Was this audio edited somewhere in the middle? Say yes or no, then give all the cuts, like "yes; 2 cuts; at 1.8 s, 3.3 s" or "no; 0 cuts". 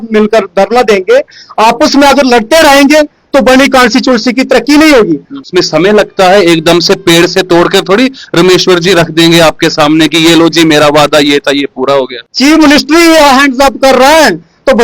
yes; 2 cuts; at 5.4 s, 12.2 s